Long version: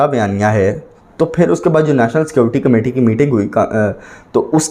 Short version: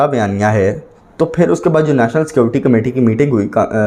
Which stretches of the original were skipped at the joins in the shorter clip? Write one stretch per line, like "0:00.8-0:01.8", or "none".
none